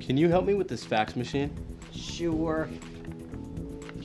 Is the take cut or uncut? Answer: cut